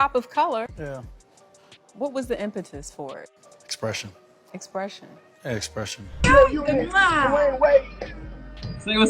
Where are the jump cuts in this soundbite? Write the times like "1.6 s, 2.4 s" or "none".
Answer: 6.1 s